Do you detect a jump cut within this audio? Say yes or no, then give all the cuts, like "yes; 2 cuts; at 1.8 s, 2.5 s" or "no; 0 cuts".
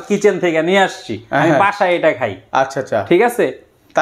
no; 0 cuts